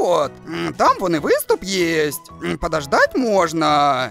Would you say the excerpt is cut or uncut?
uncut